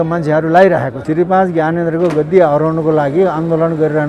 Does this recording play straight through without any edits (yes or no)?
no